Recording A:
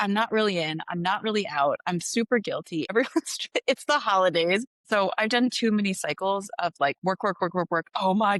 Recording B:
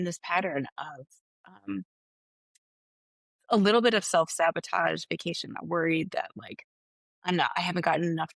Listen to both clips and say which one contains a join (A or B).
A